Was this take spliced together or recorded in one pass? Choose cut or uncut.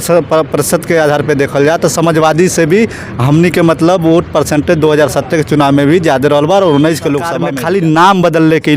cut